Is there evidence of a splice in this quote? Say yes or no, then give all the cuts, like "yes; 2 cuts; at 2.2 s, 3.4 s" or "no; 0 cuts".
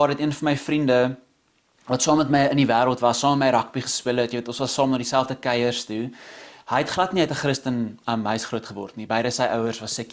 no; 0 cuts